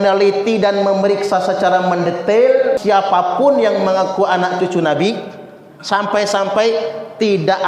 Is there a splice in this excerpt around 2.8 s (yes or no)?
yes